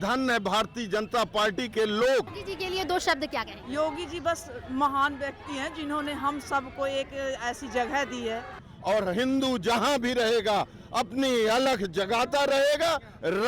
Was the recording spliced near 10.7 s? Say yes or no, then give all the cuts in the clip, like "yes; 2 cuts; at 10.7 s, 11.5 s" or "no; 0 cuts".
no; 3 cuts; at 2.4 s, 3.6 s, 8.6 s